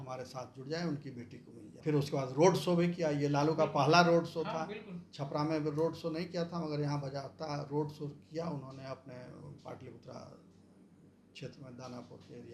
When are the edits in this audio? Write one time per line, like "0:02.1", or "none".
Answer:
0:01.8